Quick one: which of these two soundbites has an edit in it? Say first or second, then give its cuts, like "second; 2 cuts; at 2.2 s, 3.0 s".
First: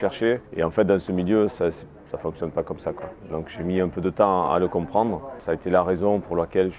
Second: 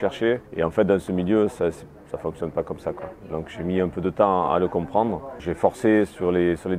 first; 1 cut; at 5.4 s